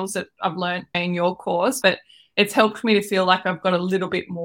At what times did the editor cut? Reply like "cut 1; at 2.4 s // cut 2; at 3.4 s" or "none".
cut 1; at 1.8 s